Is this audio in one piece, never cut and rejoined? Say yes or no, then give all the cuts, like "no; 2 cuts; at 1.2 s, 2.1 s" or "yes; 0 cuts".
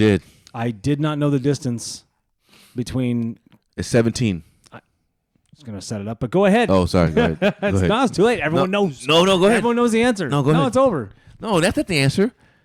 yes; 0 cuts